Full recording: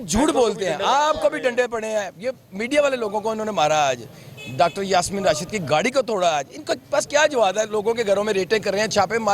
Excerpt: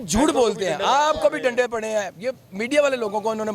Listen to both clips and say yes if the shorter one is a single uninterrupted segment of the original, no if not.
yes